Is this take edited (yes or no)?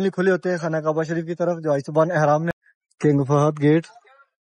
yes